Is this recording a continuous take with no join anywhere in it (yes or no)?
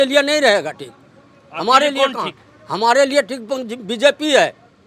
yes